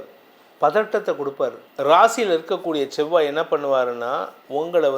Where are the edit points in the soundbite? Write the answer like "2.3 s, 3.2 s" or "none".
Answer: 1.6 s